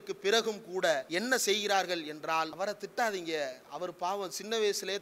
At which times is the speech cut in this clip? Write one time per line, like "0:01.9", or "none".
0:01.1
0:02.5